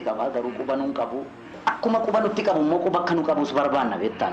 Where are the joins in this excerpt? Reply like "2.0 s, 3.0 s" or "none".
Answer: 1.5 s